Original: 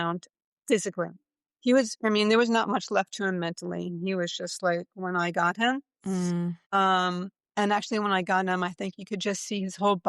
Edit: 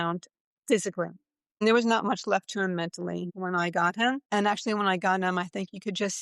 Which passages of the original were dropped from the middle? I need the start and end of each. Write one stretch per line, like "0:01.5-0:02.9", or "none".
0:01.6-0:02.2
0:03.9-0:04.9
0:05.8-0:07.5